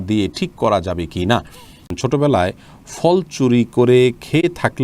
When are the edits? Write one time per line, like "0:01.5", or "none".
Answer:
0:01.9